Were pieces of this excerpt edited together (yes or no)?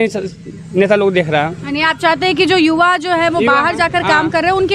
no